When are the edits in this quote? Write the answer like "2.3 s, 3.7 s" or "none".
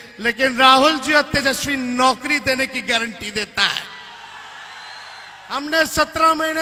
none